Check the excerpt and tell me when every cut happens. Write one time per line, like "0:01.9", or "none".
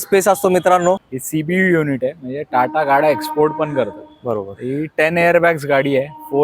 0:01.1